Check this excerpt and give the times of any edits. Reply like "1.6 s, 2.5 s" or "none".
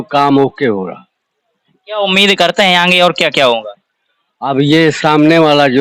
none